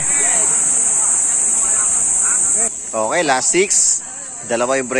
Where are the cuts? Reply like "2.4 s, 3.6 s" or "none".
2.8 s